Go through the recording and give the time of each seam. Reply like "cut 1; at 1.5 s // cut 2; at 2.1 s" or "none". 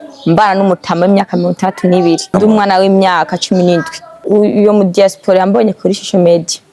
cut 1; at 2.2 s // cut 2; at 4.2 s